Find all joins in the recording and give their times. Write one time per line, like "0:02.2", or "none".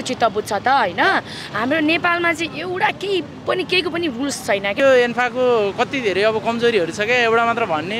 0:04.8